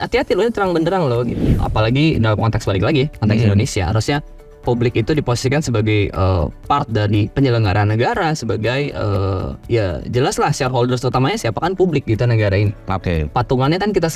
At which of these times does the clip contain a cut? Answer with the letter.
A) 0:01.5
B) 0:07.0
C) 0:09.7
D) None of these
A